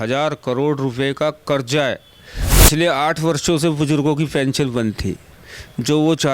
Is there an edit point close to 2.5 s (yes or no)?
yes